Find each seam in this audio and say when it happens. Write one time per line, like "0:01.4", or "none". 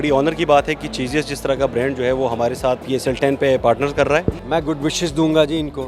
0:02.8
0:04.4